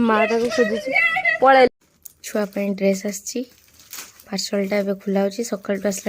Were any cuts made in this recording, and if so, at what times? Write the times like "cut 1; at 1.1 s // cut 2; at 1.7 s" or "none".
cut 1; at 1.7 s